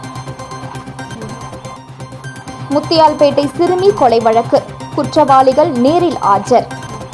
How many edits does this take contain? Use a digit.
1